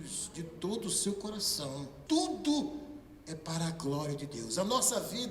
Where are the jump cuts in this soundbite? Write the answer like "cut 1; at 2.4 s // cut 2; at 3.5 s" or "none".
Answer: cut 1; at 1.9 s